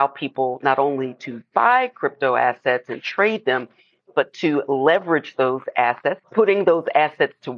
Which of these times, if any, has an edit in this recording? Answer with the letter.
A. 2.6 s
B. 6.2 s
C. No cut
B